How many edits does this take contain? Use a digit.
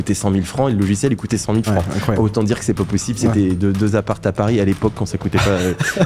0